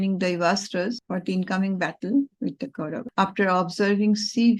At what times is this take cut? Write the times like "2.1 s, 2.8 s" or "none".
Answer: 1.1 s, 3.0 s